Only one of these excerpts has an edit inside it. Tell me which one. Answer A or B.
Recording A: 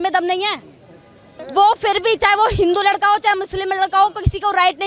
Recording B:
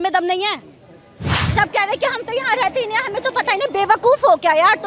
B